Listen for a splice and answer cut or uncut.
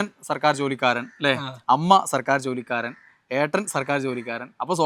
uncut